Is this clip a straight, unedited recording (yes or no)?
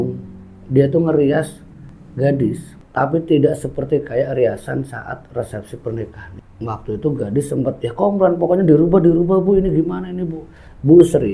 no